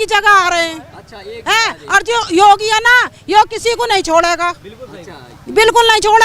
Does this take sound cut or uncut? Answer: uncut